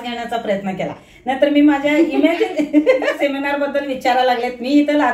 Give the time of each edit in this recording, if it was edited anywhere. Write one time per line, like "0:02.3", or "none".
0:03.1